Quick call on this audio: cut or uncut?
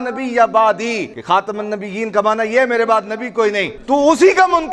cut